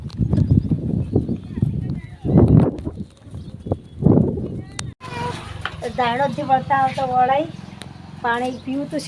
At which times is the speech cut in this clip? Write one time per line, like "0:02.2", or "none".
0:05.1